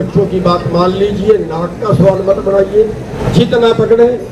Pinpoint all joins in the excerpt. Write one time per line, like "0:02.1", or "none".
0:03.1